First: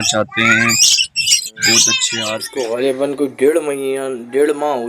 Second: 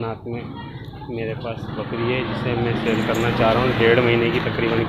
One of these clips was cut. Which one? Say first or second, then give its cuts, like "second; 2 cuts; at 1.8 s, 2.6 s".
first; 1 cut; at 2.2 s